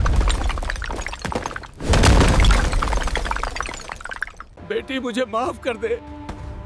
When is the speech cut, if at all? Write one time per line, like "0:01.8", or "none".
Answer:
0:04.6